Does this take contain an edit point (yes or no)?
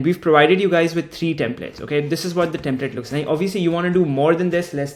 no